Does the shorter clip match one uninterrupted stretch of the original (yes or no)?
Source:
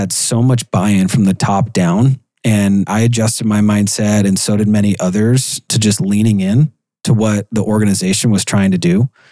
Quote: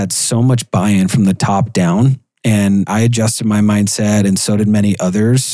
yes